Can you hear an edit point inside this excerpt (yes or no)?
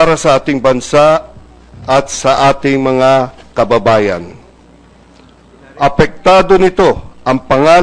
no